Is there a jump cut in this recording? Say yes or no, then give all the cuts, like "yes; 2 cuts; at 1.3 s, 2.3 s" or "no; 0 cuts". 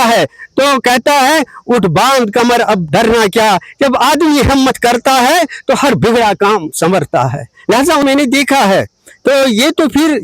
yes; 1 cut; at 8.0 s